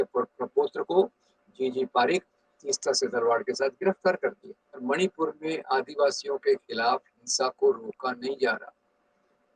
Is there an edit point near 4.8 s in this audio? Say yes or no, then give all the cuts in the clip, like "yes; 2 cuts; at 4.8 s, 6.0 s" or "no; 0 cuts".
yes; 1 cut; at 4.8 s